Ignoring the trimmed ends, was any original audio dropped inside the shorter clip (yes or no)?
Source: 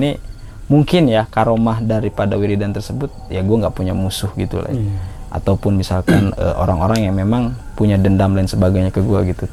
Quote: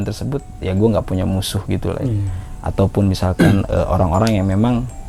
no